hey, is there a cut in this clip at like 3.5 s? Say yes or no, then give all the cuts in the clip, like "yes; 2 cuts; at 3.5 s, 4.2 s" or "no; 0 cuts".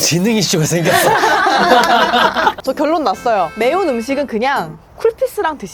yes; 2 cuts; at 2.6 s, 3.5 s